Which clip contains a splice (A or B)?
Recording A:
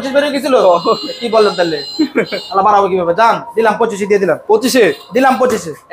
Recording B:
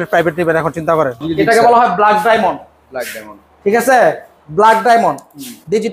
B